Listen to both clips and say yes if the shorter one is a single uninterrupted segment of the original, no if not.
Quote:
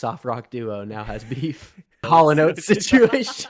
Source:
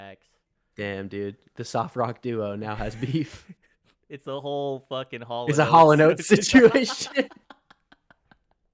no